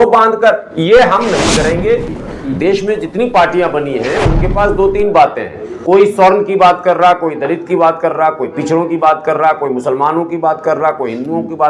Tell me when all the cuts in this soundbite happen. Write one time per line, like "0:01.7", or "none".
0:02.2